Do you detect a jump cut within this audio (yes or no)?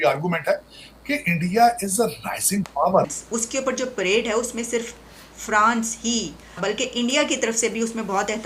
yes